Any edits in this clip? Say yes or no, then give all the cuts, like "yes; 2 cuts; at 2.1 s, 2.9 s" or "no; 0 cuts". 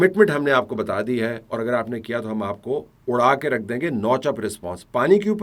no; 0 cuts